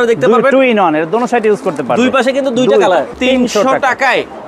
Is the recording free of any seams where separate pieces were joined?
no; 1 cut; at 3.1 s

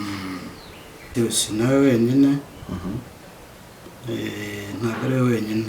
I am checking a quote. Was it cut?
yes; 1 cut; at 1.0 s

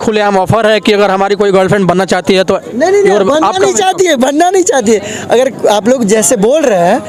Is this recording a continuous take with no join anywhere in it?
yes; 0 cuts

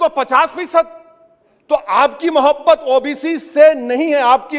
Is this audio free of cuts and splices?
yes; 0 cuts

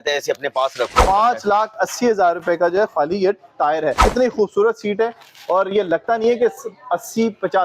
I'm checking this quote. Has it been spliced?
yes; 2 cuts; at 1.0 s, 4.0 s

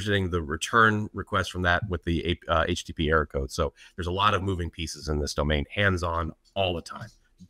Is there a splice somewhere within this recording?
yes; 1 cut; at 5.7 s

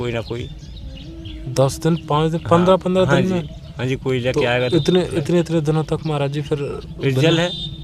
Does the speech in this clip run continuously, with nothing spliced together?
yes; 0 cuts

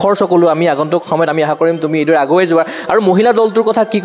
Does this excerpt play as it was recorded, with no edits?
yes; 0 cuts

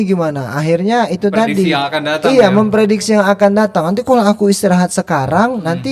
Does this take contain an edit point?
no; 0 cuts

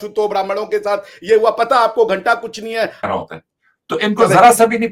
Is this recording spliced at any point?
yes; 1 cut; at 3.1 s

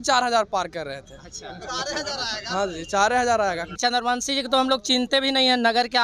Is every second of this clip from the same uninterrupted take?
no; 1 cut; at 3.8 s

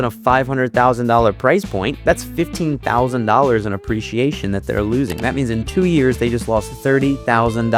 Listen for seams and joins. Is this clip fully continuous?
yes; 0 cuts

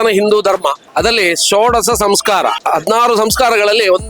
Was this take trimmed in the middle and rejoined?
yes; 2 cuts; at 0.8 s, 2.6 s

